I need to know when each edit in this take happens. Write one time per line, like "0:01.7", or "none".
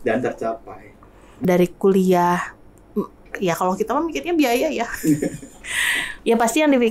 0:01.3